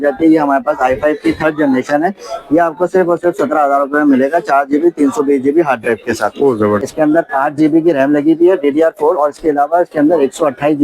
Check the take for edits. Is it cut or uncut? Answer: cut